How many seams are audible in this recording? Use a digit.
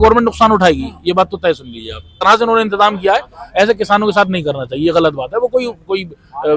1